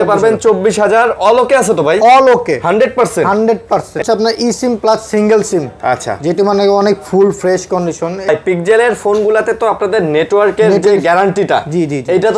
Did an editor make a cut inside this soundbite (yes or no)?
yes